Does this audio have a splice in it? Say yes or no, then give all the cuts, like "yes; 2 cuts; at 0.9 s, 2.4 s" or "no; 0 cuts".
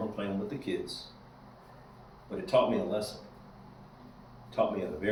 no; 0 cuts